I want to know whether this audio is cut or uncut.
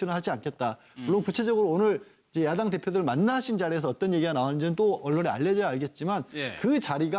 cut